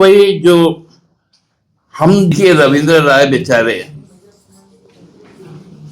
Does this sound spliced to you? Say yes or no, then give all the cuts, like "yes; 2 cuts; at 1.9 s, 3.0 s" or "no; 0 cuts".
yes; 1 cut; at 2.3 s